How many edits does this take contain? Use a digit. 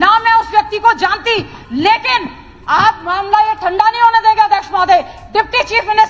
0